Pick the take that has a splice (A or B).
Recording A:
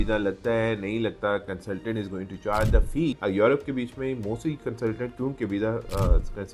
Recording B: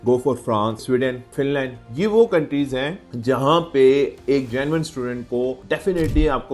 A